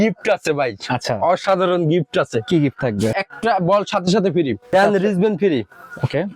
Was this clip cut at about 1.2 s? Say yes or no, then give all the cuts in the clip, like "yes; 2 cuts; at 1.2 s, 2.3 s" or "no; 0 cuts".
no; 2 cuts; at 3.1 s, 4.7 s